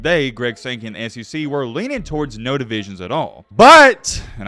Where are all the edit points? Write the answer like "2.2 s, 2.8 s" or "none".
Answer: 3.4 s